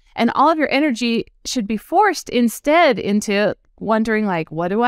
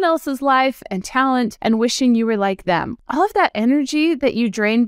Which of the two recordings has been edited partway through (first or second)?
second